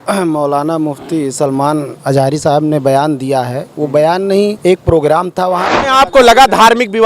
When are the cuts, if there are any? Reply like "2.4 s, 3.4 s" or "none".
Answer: 4.6 s, 5.7 s

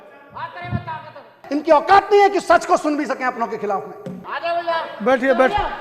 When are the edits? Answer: 1.5 s, 4.2 s

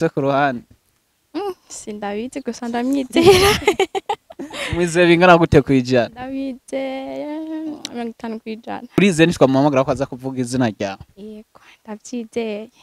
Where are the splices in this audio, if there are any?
9.0 s

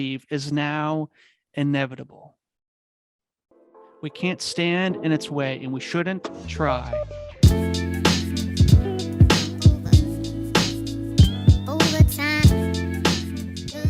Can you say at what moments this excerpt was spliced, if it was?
6.8 s

